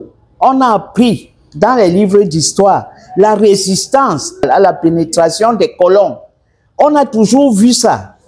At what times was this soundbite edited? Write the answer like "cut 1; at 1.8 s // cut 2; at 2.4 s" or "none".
cut 1; at 4.4 s

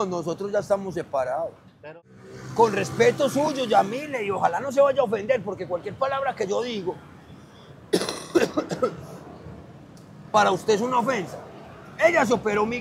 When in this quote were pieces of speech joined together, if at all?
cut 1; at 1.9 s

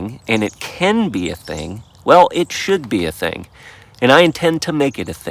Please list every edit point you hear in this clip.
none

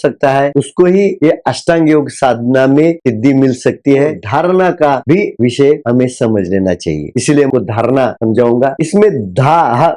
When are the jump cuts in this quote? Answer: cut 1; at 4.2 s // cut 2; at 7.5 s

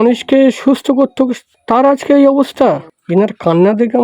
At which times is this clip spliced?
cut 1; at 2.9 s

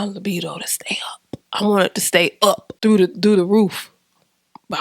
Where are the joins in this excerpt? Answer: cut 1; at 2.8 s

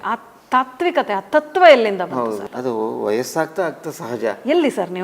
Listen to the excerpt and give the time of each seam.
cut 1; at 2.5 s

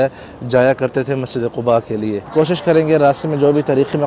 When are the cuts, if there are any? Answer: cut 1; at 2.2 s

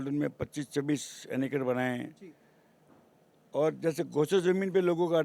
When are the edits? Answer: none

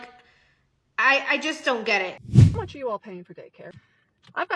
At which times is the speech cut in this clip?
cut 1; at 2.2 s

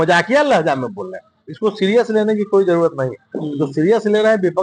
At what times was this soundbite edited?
none

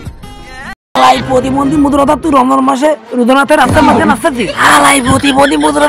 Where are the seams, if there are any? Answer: cut 1; at 0.9 s

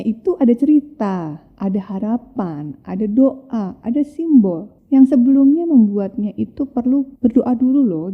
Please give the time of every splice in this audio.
cut 1; at 4.7 s // cut 2; at 7.1 s

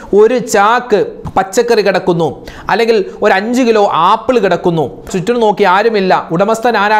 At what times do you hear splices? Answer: cut 1; at 1.2 s // cut 2; at 5.1 s

